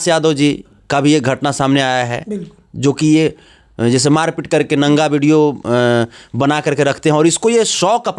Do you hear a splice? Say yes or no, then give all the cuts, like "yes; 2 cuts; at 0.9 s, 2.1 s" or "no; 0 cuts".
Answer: no; 0 cuts